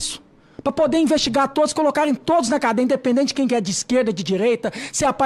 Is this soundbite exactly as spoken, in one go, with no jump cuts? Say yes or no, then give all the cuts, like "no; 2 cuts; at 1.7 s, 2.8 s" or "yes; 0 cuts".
yes; 0 cuts